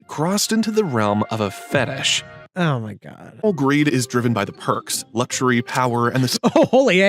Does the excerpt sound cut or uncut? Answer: cut